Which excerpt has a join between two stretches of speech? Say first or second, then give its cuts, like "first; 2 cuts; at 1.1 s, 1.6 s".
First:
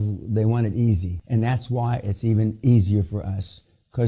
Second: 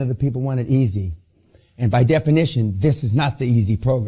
first; 1 cut; at 1.1 s